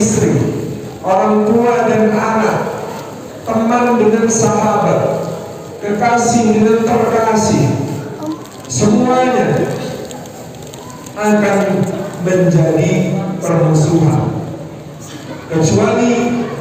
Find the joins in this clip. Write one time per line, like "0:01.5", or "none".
none